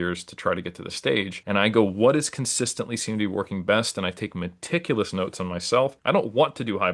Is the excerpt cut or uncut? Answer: cut